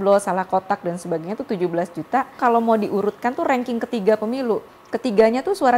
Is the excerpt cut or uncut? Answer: cut